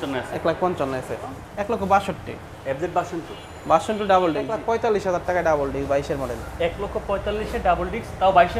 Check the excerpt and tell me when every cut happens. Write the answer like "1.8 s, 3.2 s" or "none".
1.5 s, 4.5 s